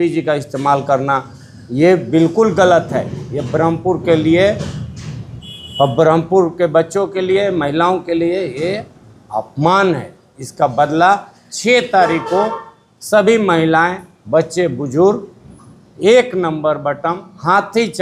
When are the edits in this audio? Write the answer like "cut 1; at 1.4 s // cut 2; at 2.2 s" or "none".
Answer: none